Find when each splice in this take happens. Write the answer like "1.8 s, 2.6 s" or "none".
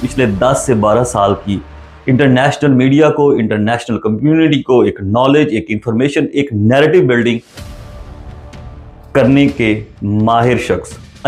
none